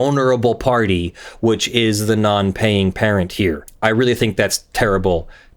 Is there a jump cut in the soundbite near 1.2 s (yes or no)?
no